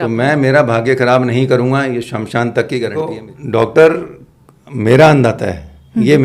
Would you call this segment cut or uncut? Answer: cut